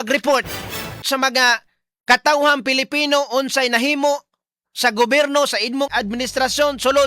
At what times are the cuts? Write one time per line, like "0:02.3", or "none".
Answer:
0:01.3
0:05.9